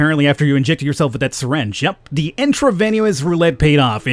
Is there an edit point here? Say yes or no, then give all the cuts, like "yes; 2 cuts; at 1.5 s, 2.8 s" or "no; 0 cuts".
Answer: no; 0 cuts